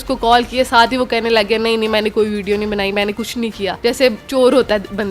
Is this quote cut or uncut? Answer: cut